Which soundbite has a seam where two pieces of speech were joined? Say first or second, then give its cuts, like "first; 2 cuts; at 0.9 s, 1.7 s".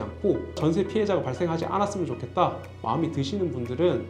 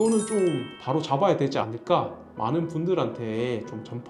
second; 1 cut; at 2.2 s